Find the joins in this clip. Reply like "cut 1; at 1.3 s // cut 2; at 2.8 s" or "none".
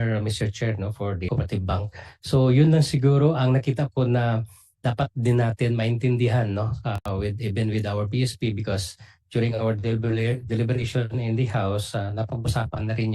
cut 1; at 1.3 s